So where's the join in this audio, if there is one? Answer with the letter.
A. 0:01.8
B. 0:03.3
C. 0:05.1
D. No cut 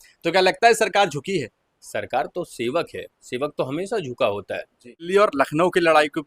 C